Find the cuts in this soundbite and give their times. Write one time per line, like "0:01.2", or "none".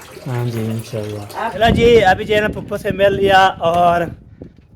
0:01.6